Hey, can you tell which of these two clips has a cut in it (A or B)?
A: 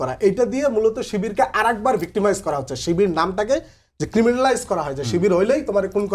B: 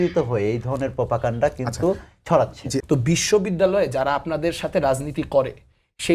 B